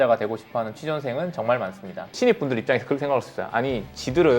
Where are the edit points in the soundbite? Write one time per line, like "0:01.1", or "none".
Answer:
0:02.1